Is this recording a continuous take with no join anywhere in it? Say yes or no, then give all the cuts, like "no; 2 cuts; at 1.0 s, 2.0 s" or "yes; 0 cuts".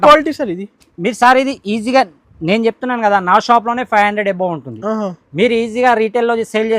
yes; 0 cuts